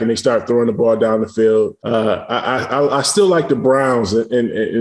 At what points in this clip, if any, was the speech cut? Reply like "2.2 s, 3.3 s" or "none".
1.8 s